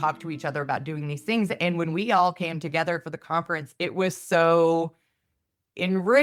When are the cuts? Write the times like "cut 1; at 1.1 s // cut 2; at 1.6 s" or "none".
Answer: none